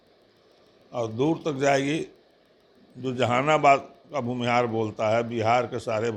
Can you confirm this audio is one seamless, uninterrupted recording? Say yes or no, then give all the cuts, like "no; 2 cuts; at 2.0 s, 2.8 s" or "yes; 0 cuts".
yes; 0 cuts